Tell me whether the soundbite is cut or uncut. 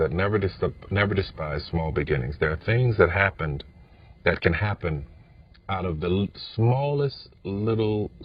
uncut